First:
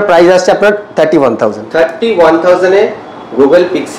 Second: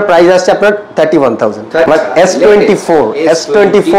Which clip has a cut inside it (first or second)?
second